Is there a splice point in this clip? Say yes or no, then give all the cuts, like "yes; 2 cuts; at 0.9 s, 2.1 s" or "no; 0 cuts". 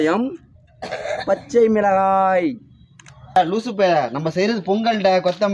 yes; 1 cut; at 3.3 s